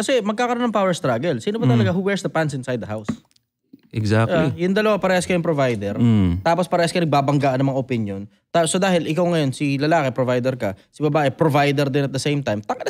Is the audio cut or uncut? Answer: uncut